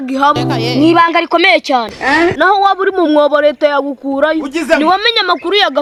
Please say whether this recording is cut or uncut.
uncut